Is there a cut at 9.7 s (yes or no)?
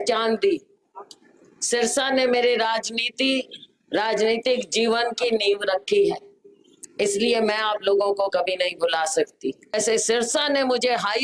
yes